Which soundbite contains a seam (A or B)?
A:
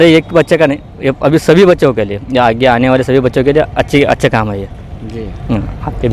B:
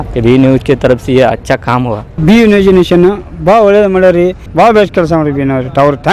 B